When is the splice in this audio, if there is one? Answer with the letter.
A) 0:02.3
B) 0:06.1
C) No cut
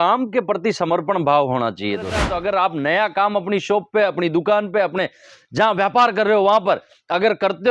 A